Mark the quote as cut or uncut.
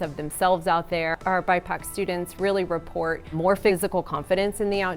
cut